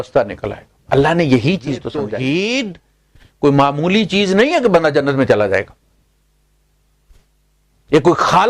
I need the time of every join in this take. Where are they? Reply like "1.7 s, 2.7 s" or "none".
1.9 s